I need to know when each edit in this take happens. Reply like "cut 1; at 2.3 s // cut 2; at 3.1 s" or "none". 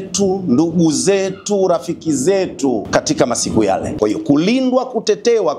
cut 1; at 2.9 s // cut 2; at 3.9 s